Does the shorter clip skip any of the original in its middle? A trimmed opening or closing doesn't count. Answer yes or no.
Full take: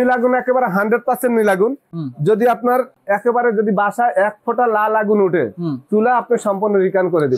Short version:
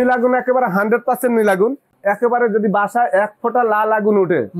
yes